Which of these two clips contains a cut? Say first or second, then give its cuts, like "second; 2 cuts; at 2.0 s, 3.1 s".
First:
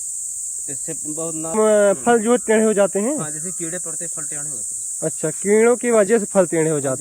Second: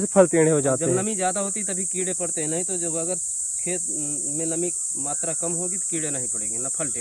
first; 1 cut; at 1.5 s